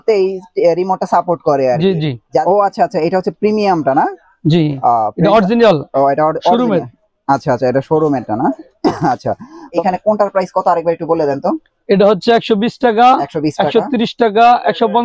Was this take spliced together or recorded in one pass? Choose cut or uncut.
cut